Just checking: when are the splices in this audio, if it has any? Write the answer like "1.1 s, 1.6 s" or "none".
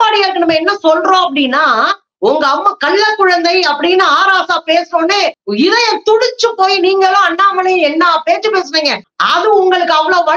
9.1 s